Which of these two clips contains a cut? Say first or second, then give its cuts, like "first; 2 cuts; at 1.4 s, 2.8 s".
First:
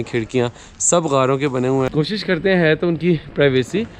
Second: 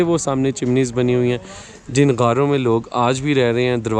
first; 1 cut; at 1.9 s